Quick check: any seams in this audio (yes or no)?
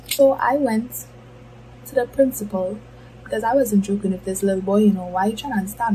no